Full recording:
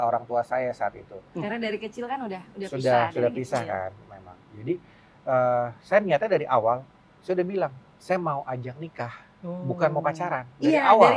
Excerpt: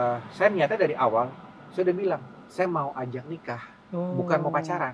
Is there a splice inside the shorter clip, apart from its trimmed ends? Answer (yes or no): no